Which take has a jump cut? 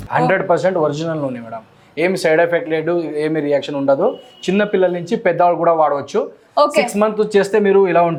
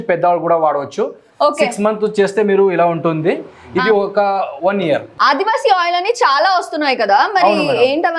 second; 1 cut; at 5.1 s

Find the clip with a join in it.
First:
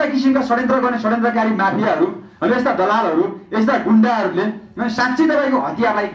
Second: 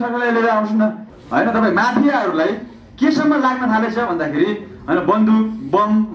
second; 1 cut; at 1.1 s

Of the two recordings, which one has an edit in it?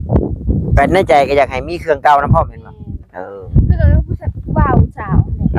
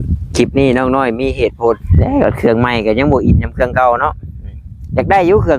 second; 1 cut; at 1.9 s

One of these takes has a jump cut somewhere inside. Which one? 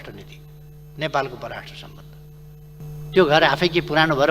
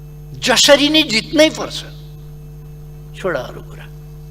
first; 1 cut; at 2.8 s

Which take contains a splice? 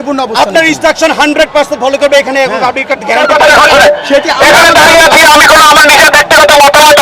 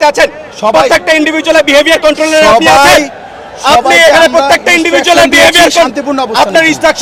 first; 1 cut; at 3.2 s

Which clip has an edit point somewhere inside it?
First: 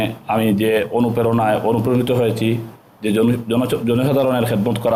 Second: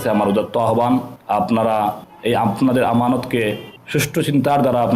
second; 3 cuts; at 1.1 s, 2.1 s, 3.7 s

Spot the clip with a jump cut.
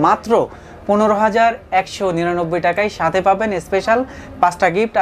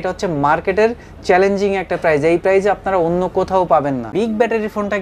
second; 1 cut; at 4.1 s

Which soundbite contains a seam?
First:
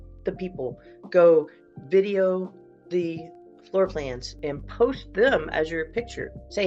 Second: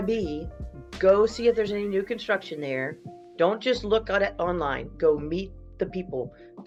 first; 1 cut; at 4.3 s

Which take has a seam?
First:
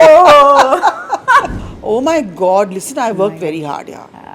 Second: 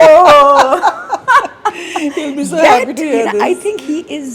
first; 1 cut; at 1.5 s

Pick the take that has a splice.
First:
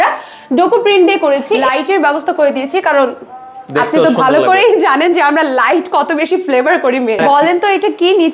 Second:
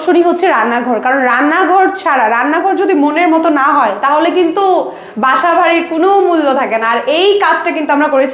first; 2 cuts; at 1.6 s, 7.2 s

